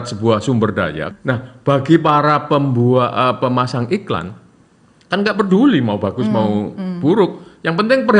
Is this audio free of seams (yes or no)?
no